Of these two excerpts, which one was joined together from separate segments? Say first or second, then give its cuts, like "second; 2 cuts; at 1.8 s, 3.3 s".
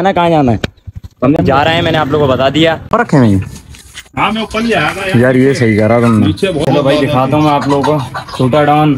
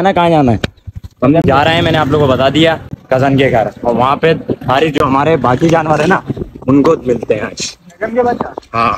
first; 2 cuts; at 2.9 s, 6.6 s